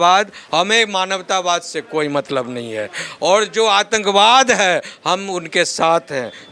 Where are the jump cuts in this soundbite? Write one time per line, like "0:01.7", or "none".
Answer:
none